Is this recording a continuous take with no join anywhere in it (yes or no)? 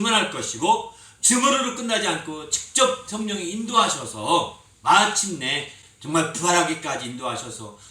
no